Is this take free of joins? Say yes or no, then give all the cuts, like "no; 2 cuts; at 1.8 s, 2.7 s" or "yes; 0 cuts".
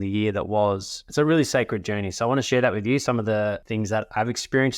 no; 2 cuts; at 0.9 s, 2.5 s